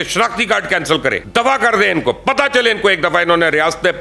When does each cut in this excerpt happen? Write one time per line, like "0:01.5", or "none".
0:01.2